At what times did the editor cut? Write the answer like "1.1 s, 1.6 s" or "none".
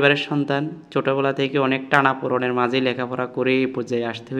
none